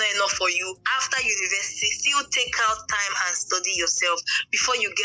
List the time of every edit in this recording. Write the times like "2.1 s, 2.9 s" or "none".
none